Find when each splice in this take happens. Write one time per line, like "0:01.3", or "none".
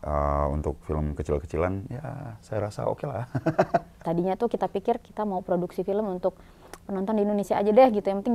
0:03.9